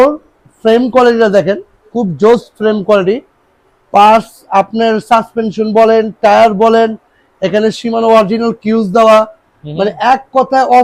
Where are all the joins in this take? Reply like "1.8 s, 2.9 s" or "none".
none